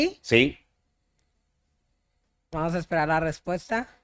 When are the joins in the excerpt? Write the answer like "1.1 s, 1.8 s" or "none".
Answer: none